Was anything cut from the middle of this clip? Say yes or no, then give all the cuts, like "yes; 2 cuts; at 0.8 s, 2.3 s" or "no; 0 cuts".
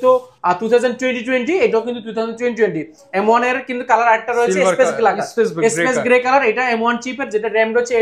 no; 0 cuts